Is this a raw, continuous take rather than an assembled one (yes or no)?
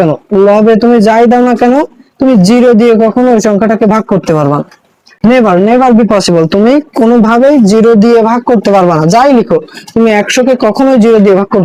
yes